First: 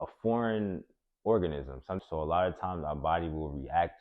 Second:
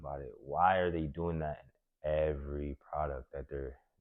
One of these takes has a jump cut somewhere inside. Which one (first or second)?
first